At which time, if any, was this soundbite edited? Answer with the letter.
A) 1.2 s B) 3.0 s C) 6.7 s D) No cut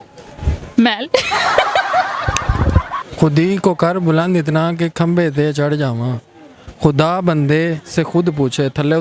B